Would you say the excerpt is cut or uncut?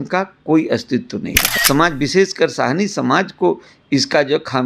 cut